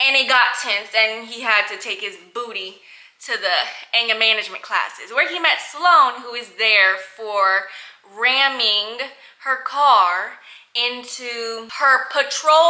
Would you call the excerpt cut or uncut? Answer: uncut